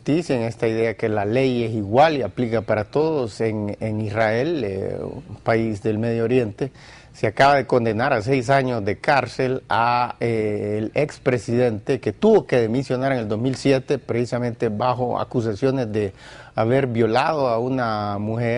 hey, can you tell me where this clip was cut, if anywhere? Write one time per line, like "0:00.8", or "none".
0:16.4